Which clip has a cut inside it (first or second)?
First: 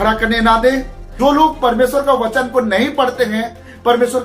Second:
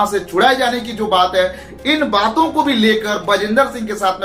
first